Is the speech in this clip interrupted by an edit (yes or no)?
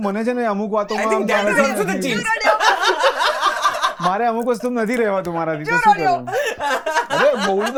no